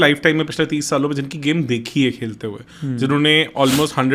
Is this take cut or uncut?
uncut